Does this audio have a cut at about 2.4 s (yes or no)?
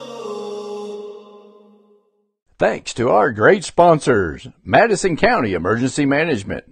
yes